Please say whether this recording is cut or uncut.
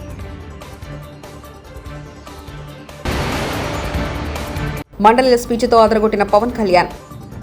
uncut